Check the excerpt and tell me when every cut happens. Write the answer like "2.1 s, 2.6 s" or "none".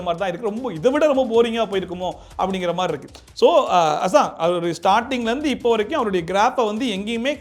none